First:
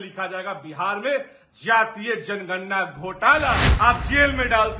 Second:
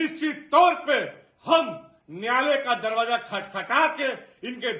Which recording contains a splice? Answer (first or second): first